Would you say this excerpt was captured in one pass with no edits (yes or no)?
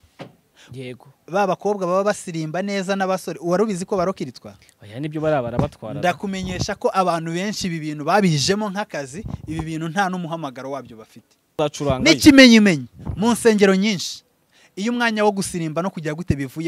no